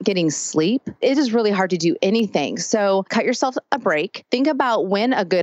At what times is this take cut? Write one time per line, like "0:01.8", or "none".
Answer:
0:00.9
0:03.1
0:04.2